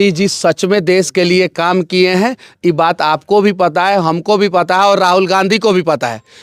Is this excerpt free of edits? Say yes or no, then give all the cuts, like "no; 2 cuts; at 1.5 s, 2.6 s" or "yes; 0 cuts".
yes; 0 cuts